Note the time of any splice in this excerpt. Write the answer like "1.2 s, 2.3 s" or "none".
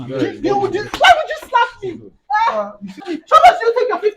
3.0 s